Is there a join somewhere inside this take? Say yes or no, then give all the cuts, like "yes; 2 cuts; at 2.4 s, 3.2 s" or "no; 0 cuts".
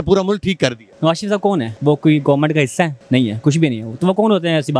yes; 3 cuts; at 0.9 s, 1.7 s, 3.0 s